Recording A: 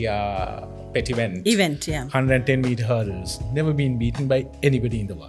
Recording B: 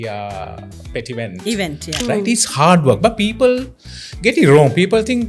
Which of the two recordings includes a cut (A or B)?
B